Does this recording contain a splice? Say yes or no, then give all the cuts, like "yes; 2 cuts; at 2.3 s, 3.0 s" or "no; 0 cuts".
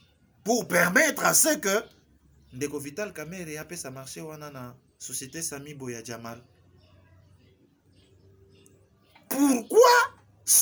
no; 0 cuts